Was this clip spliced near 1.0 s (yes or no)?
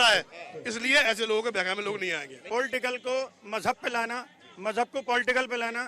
no